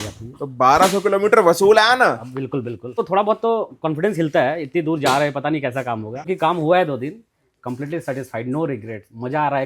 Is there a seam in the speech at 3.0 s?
yes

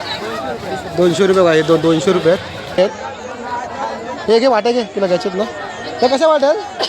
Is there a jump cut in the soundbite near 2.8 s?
yes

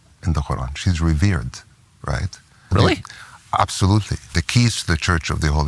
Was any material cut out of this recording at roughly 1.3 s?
no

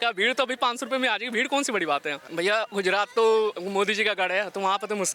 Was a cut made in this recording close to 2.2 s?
yes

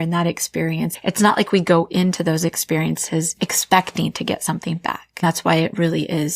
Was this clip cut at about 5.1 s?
no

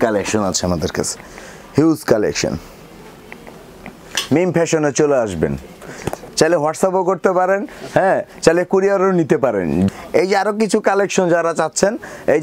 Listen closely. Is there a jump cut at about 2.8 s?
no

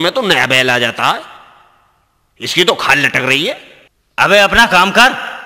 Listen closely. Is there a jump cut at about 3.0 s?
no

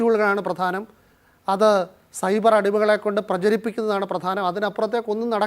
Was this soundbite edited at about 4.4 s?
yes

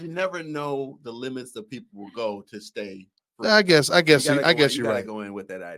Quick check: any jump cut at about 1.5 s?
no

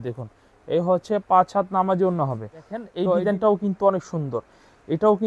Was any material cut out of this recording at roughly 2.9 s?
yes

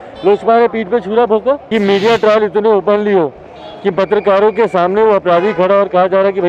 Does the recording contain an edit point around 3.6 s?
no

